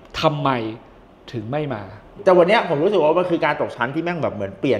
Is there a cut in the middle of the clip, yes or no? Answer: yes